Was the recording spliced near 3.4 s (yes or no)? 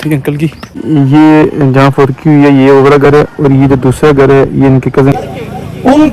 no